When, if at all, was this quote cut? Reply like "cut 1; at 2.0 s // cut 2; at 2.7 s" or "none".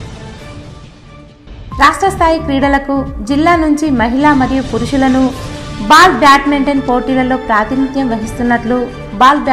cut 1; at 1.6 s